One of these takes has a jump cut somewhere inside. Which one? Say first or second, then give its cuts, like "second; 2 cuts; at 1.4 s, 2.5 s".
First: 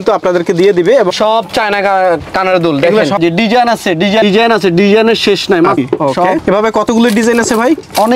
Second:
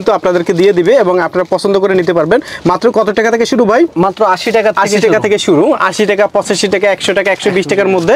first; 3 cuts; at 1.1 s, 3.2 s, 5.8 s